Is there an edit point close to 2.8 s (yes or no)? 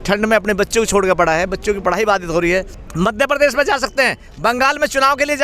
yes